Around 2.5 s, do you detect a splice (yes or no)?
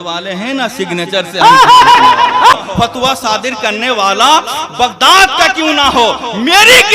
yes